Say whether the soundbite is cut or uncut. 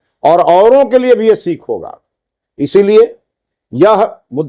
uncut